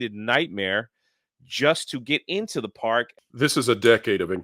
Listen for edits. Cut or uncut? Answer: cut